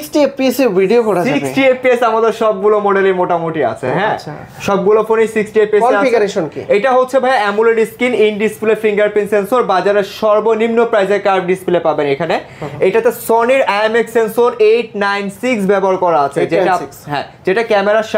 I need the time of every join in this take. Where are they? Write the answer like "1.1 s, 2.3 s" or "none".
none